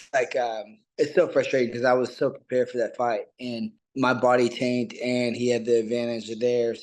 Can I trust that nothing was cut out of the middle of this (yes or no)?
no